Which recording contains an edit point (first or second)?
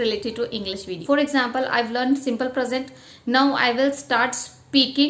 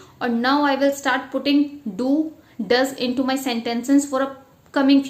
first